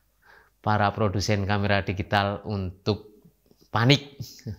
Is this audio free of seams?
yes; 0 cuts

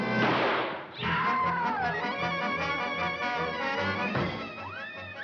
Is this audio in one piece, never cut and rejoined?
yes; 0 cuts

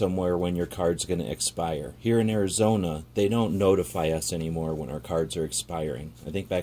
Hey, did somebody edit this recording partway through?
no; 0 cuts

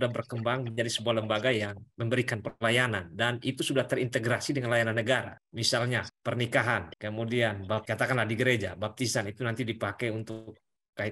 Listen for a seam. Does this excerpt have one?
no; 0 cuts

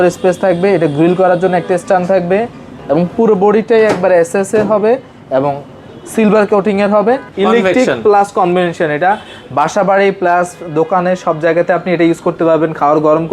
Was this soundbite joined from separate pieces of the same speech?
yes; 2 cuts; at 2.7 s, 7.3 s

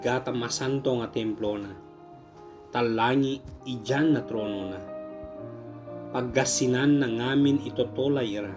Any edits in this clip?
no; 0 cuts

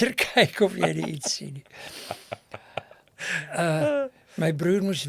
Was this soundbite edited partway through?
no; 0 cuts

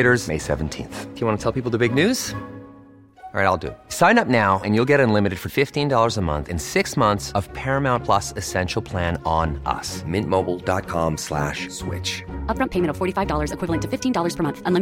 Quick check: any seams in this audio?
no; 0 cuts

